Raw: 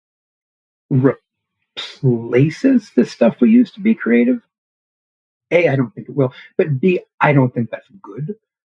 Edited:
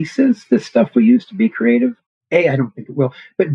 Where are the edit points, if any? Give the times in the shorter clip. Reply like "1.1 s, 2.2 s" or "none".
2.1 s

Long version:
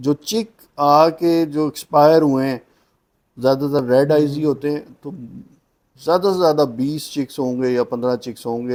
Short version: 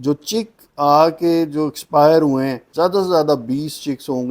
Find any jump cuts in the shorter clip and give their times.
2.6 s

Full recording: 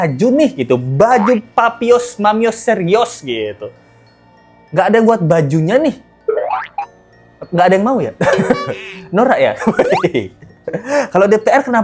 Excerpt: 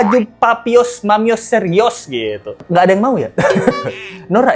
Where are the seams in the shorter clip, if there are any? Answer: 2.5 s

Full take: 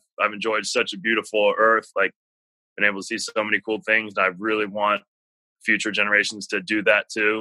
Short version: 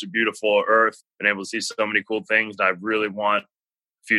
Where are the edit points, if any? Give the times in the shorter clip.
1.0 s

